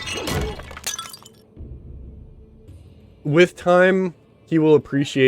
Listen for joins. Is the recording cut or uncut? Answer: cut